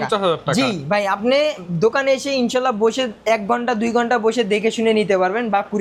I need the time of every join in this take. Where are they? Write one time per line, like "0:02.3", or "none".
none